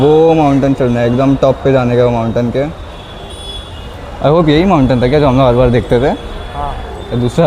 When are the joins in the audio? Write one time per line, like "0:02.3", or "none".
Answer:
none